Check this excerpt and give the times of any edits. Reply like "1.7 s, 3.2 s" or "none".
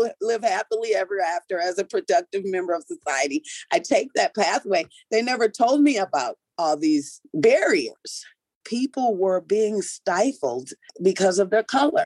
8.6 s, 10.9 s

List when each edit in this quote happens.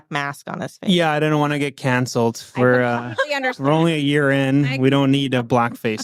none

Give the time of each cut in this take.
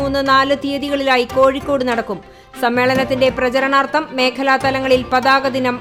none

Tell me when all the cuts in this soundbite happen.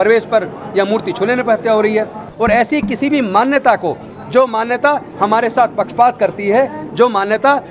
2.3 s

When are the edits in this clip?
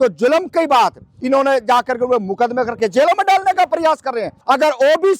1.1 s, 4.3 s

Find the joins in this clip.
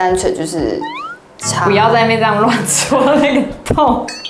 none

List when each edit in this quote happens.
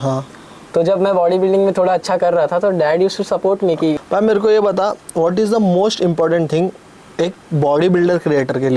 4.0 s

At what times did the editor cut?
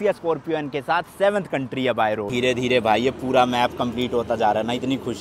2.3 s

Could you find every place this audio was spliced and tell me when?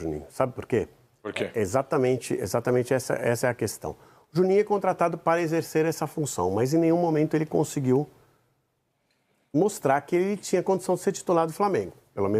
none

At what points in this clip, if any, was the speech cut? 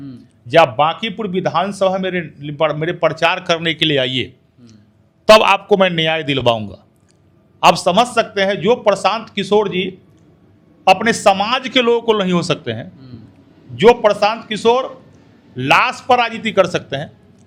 none

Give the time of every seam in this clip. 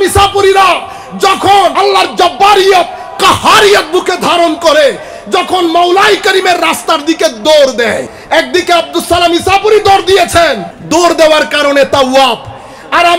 1.7 s, 8.1 s, 10.7 s

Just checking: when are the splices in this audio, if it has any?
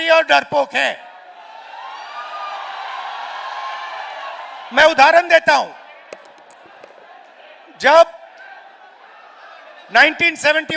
none

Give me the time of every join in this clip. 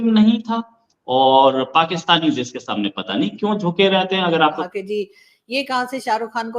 4.6 s

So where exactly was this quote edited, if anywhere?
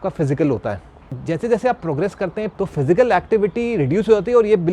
1.2 s, 2.5 s

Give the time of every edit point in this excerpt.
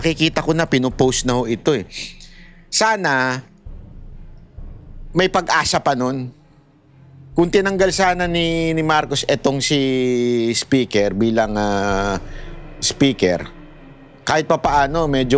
none

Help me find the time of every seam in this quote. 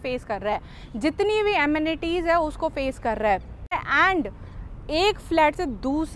3.8 s

